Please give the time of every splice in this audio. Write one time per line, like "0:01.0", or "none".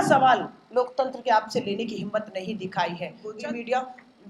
0:03.3